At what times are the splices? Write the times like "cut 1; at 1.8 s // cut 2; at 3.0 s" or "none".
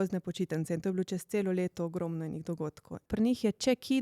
cut 1; at 3.0 s